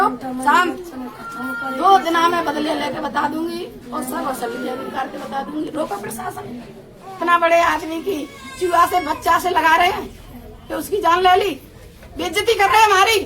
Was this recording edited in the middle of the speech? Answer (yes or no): yes